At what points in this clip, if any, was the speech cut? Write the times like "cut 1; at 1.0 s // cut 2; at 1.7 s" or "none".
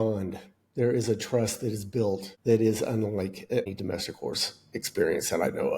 cut 1; at 2.3 s // cut 2; at 3.7 s